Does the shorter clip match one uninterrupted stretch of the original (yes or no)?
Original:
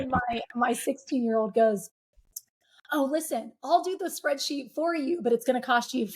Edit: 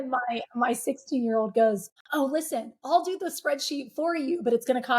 no